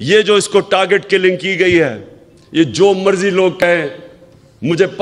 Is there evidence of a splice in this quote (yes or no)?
no